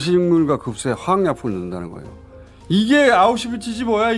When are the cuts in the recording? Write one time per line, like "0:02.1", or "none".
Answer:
none